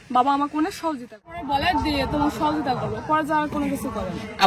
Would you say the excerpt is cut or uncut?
cut